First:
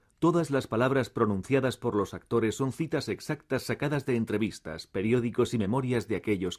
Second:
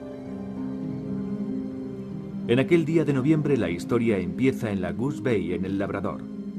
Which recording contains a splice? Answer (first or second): second